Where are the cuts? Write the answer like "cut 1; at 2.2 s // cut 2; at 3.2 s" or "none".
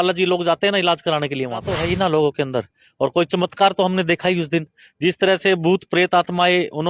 cut 1; at 1.8 s